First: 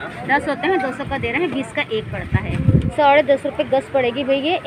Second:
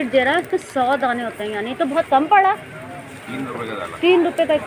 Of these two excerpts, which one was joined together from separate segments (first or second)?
first